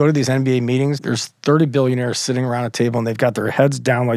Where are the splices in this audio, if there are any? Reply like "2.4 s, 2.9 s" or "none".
1.0 s